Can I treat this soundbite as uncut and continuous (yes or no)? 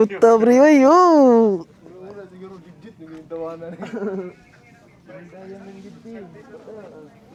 yes